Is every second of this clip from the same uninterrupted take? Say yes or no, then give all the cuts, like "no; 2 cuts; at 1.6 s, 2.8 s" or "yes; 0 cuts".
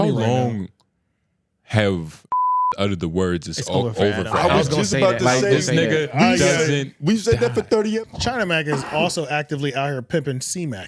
no; 1 cut; at 8.1 s